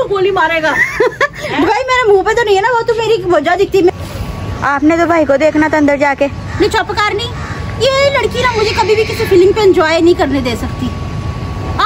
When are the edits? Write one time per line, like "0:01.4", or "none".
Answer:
0:03.9
0:10.9